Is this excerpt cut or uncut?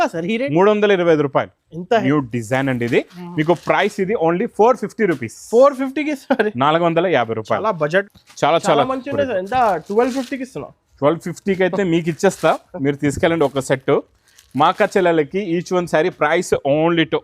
cut